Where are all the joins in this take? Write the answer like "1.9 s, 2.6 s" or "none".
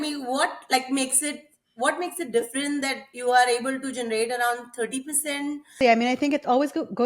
5.8 s

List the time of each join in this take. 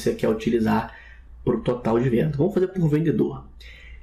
none

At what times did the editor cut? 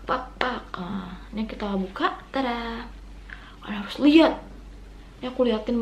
none

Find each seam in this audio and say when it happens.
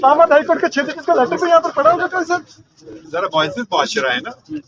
2.9 s

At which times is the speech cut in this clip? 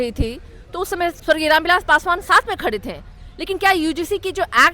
1.2 s

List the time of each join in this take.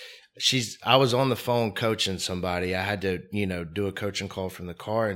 none

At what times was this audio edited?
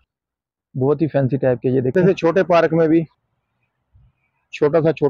1.9 s

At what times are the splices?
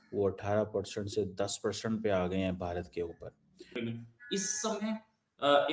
3.7 s

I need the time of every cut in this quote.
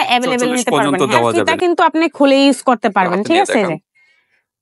1.4 s

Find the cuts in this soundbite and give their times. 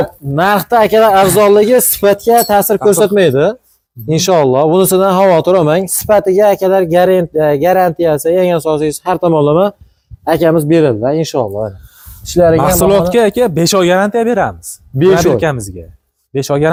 none

